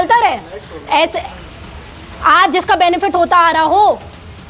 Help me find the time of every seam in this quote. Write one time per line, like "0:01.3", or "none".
0:01.2